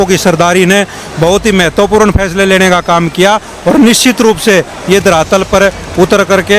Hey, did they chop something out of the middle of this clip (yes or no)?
no